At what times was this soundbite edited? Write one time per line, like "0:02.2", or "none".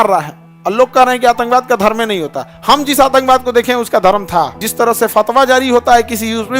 0:04.6